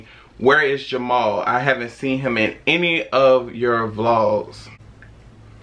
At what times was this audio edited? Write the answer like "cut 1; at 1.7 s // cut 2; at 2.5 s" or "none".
cut 1; at 4.7 s